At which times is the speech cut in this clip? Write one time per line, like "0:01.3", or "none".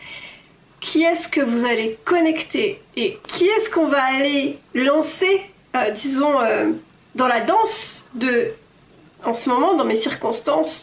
0:03.2
0:04.6